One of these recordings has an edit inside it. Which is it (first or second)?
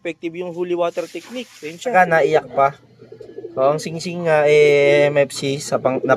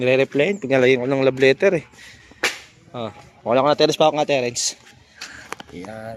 first